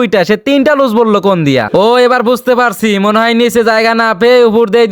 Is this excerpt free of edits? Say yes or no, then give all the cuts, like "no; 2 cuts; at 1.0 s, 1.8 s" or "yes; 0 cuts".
no; 1 cut; at 1.7 s